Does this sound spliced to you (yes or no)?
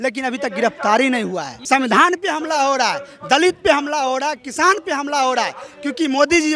yes